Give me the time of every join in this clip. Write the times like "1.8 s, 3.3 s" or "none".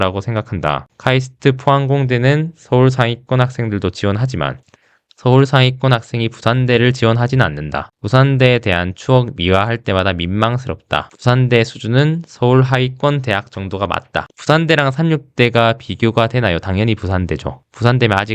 14.3 s